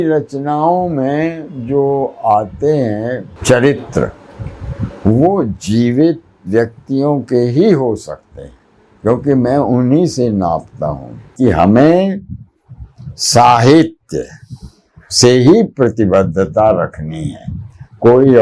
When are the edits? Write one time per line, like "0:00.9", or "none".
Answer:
0:03.3
0:11.3